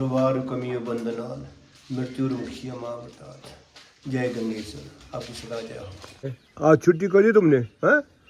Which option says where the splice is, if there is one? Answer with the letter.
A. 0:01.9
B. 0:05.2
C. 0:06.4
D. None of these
C